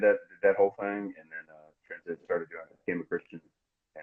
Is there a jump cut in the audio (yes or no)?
no